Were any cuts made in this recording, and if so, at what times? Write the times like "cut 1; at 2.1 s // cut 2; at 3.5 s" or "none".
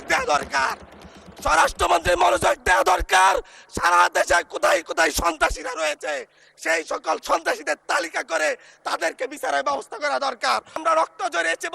cut 1; at 10.8 s